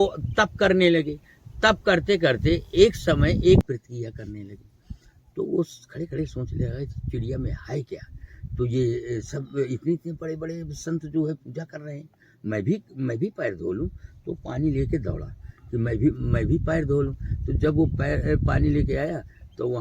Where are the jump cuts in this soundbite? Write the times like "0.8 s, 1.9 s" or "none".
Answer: 3.6 s